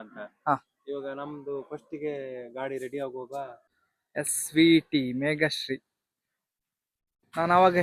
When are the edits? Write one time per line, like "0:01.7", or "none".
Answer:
0:03.6